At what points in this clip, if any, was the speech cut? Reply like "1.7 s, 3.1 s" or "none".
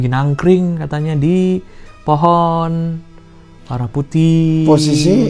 none